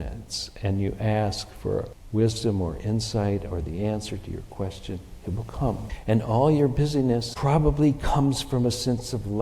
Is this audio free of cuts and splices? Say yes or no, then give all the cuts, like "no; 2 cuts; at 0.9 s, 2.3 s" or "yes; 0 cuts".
no; 3 cuts; at 2.0 s, 5.9 s, 7.3 s